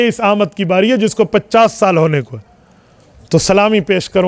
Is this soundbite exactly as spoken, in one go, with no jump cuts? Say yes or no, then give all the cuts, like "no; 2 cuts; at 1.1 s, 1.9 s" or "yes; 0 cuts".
yes; 0 cuts